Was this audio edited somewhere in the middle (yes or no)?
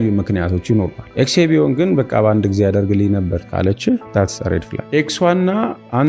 yes